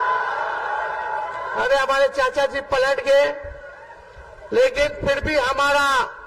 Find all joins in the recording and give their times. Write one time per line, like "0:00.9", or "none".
none